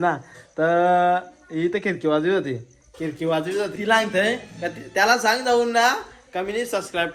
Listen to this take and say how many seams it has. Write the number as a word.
one